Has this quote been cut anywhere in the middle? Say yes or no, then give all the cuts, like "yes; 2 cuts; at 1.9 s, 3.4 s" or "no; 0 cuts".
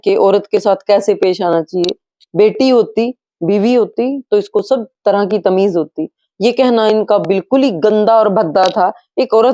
no; 0 cuts